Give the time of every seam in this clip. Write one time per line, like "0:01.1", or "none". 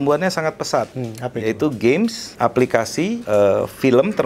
0:01.0
0:02.8